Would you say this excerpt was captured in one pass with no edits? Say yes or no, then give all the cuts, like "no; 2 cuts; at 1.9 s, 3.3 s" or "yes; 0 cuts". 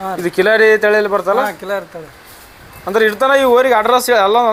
yes; 0 cuts